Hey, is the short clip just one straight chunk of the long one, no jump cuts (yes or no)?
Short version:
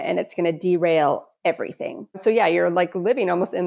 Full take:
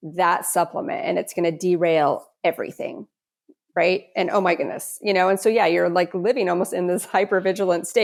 no